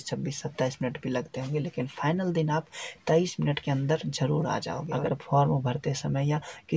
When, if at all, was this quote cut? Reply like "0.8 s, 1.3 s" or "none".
4.8 s